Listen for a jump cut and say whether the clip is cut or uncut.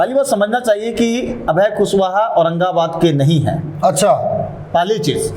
uncut